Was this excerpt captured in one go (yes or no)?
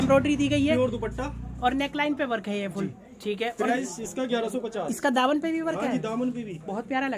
yes